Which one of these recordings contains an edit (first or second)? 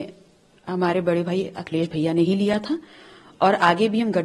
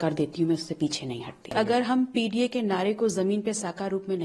second